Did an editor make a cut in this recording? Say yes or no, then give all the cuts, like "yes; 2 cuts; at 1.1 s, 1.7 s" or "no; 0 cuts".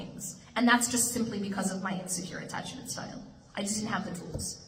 no; 0 cuts